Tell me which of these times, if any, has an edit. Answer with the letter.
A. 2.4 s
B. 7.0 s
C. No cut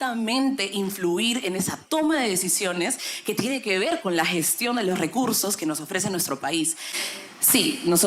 B